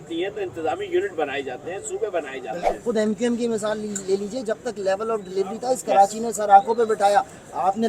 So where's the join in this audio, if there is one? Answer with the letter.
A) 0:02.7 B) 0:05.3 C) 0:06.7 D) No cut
A